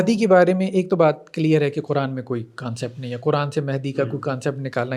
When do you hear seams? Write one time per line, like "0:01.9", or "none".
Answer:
none